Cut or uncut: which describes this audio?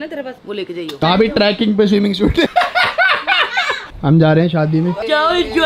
cut